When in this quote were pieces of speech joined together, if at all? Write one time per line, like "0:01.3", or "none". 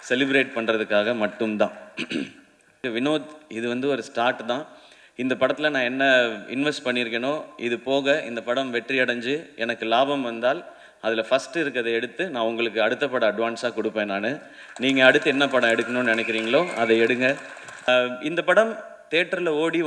0:02.8
0:17.9